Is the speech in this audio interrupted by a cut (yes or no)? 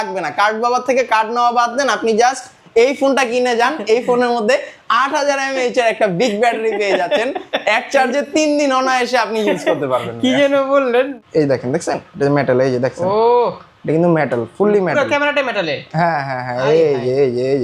yes